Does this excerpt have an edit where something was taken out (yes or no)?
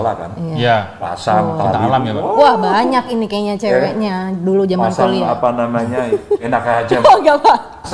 no